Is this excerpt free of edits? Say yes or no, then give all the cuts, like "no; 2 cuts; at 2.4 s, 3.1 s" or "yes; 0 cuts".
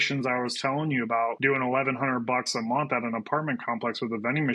no; 1 cut; at 1.4 s